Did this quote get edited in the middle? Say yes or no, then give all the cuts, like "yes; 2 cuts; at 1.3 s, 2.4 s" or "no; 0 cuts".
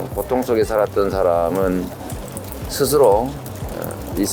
no; 0 cuts